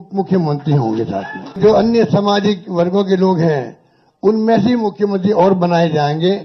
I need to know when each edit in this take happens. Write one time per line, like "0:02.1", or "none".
0:01.6